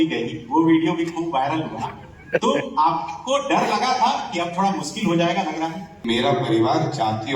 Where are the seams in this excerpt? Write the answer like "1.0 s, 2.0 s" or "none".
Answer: 5.9 s